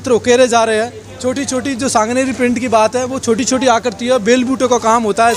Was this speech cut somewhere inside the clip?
no; 0 cuts

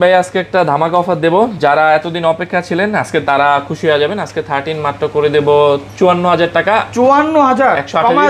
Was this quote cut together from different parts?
no; 0 cuts

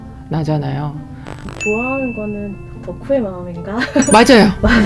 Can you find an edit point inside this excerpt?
yes; 1 cut; at 1.4 s

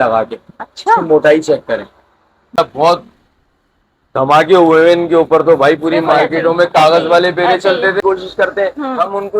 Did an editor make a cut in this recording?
yes; 2 cuts; at 2.6 s, 8.0 s

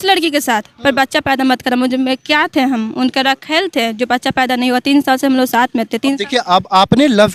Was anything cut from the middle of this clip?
no; 0 cuts

